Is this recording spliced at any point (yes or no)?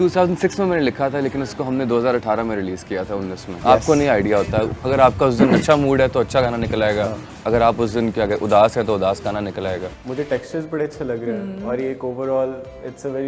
yes